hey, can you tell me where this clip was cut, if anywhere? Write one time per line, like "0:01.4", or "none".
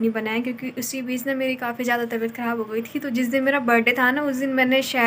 none